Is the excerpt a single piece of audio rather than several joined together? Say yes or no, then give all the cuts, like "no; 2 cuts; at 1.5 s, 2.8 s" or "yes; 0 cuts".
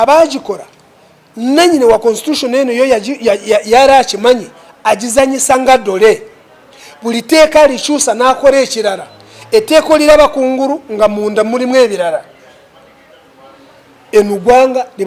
yes; 0 cuts